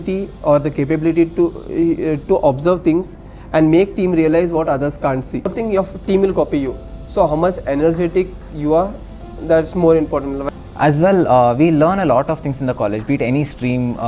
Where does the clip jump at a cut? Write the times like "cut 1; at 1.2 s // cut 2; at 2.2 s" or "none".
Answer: cut 1; at 5.5 s // cut 2; at 10.4 s